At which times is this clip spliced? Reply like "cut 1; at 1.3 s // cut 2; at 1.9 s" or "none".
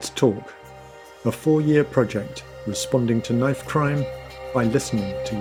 none